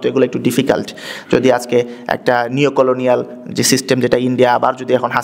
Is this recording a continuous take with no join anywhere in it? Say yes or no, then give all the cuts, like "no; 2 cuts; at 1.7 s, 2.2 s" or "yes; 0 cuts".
yes; 0 cuts